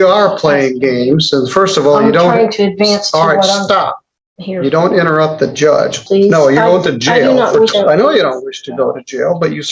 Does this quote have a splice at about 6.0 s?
yes; 2 cuts; at 6.0 s, 7.7 s

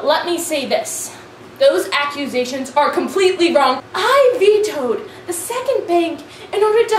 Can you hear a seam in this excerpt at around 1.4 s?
no; 1 cut; at 3.9 s

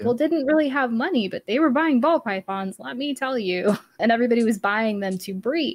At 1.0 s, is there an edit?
no; 1 cut; at 3.9 s

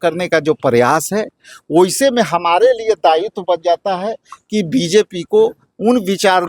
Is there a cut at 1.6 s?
no; 0 cuts

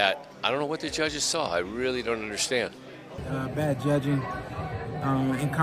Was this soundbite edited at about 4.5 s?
no; 1 cut; at 3.2 s

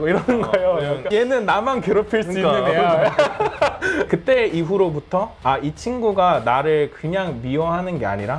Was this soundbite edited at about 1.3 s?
no; 1 cut; at 4.1 s

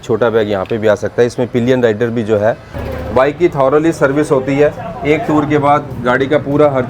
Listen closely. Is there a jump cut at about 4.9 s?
no; 1 cut; at 2.7 s

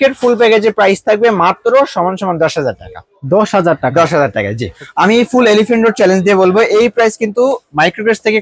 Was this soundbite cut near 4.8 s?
yes; 1 cut; at 4.8 s

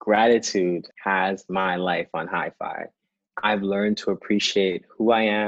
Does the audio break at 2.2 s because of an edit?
no; 1 cut; at 0.9 s

